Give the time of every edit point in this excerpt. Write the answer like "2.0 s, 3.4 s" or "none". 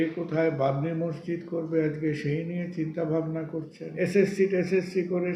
3.8 s